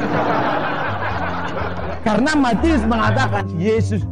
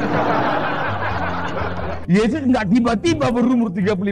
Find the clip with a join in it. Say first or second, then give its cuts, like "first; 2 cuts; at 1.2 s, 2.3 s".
second; 1 cut; at 1.9 s